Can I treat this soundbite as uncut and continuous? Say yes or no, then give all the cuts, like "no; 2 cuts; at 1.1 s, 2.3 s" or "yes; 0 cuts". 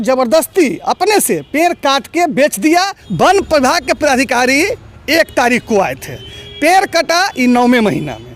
no; 1 cut; at 3.0 s